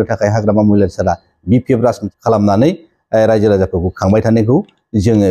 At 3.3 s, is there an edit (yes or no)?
no